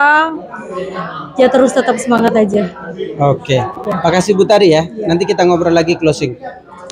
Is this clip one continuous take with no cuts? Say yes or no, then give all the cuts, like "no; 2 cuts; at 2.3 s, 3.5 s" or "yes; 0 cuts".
yes; 0 cuts